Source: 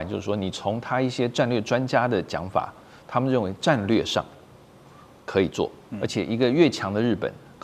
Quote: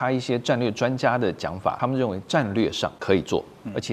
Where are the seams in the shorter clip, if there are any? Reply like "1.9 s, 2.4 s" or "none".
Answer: 1.8 s, 3.0 s